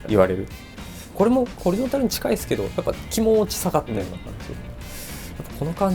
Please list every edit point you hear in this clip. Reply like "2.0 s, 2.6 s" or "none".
1.1 s